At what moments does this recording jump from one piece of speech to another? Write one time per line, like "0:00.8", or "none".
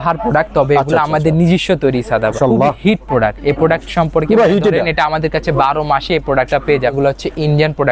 0:02.4
0:06.9